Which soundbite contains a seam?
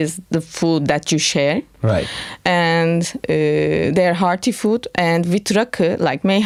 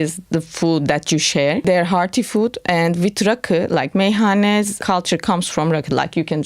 second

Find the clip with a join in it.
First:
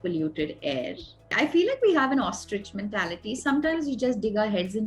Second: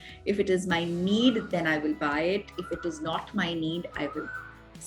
first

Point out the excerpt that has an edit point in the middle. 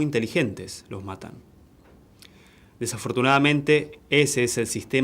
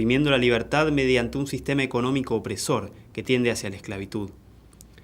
first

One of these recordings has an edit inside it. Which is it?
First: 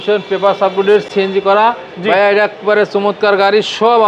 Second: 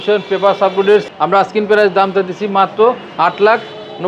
second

